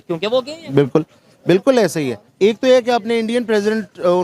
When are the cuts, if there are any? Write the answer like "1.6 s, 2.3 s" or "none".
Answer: 2.2 s